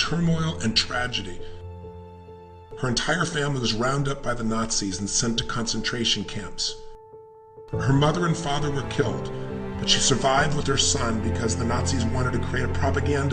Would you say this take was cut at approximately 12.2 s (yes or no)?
yes